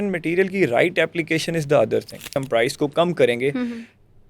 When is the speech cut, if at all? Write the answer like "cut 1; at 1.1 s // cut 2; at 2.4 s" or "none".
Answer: cut 1; at 2.4 s